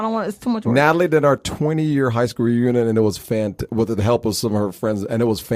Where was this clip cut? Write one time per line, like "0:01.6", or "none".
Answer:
none